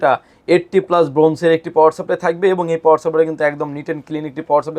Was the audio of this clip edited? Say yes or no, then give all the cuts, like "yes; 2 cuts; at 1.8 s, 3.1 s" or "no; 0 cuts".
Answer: no; 0 cuts